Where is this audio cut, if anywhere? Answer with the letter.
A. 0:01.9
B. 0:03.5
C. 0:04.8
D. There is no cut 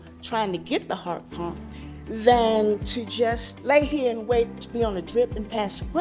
B